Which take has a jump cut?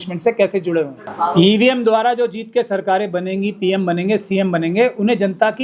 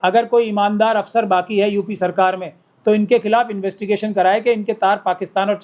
first; 1 cut; at 1.0 s

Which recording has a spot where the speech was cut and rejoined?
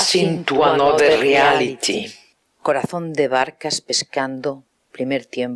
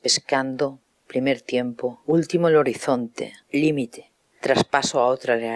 second; 1 cut; at 3.3 s

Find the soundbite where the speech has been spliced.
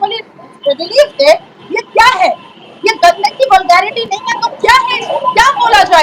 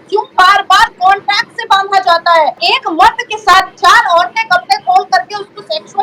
second; 1 cut; at 2.6 s

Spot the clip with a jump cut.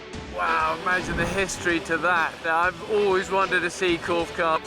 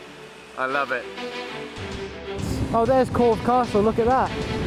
first; 1 cut; at 2.5 s

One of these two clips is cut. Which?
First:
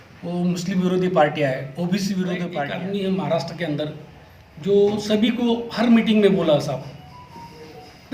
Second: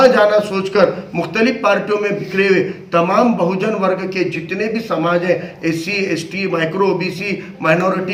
first; 1 cut; at 2.6 s

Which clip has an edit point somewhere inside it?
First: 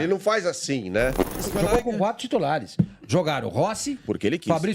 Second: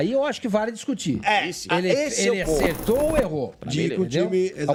first; 1 cut; at 1.4 s

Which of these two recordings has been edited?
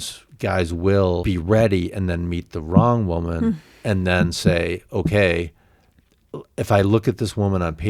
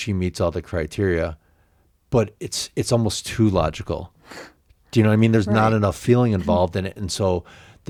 first; 1 cut; at 1.2 s

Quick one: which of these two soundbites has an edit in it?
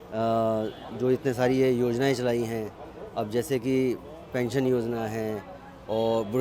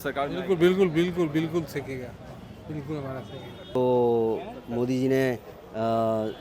second; 1 cut; at 3.8 s

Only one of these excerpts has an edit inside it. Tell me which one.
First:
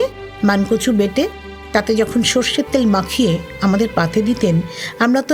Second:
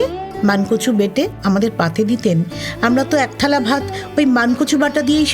second; 1 cut; at 1.4 s

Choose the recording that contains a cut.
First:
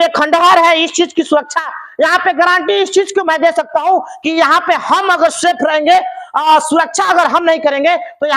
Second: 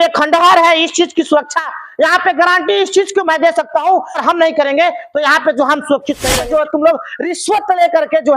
second; 2 cuts; at 4.2 s, 6.4 s

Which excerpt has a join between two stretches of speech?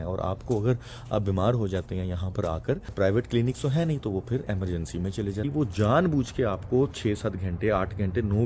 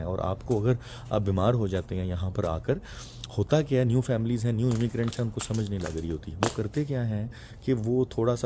first; 2 cuts; at 2.9 s, 5.5 s

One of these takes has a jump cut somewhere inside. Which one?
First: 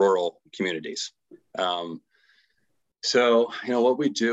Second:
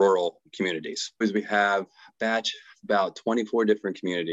second; 1 cut; at 1.2 s

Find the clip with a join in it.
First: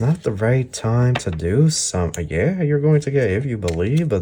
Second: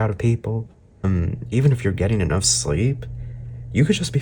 second; 1 cut; at 1.0 s

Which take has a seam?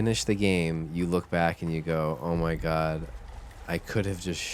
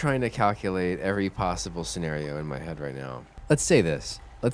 second; 1 cut; at 3.3 s

